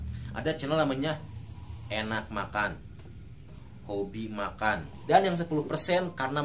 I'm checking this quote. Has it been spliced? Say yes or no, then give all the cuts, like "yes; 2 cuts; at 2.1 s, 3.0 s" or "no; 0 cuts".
yes; 1 cut; at 4.9 s